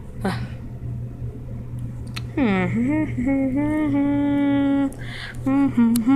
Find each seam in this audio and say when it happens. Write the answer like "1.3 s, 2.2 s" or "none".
none